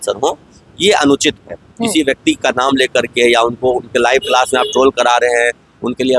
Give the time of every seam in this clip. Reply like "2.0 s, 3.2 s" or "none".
none